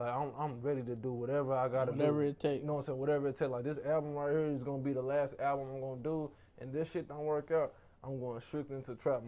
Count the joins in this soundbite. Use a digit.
0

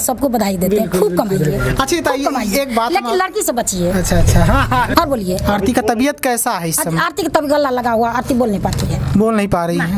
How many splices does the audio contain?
1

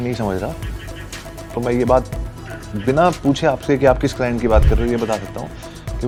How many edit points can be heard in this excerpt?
0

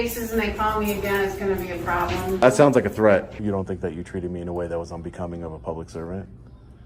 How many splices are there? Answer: 2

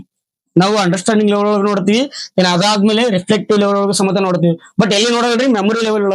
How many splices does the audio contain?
0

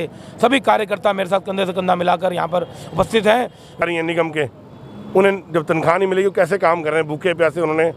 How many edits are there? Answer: 1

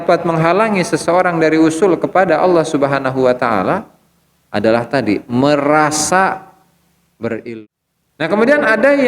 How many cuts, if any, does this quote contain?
1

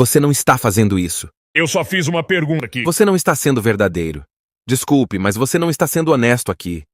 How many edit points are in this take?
1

